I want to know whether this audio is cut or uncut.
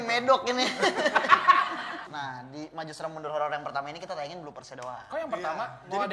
cut